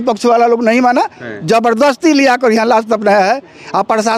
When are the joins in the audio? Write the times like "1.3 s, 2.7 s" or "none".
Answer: none